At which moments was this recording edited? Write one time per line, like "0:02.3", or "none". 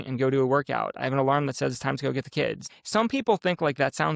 0:02.7